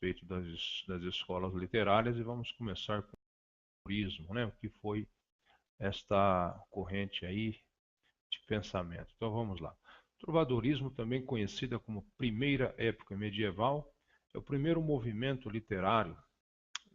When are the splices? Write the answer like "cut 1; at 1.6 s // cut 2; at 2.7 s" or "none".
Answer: cut 1; at 0.9 s